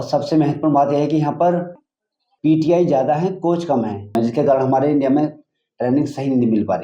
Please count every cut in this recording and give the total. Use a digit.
1